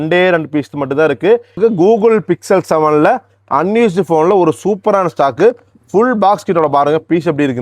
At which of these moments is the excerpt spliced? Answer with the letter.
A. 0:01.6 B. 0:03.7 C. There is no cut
A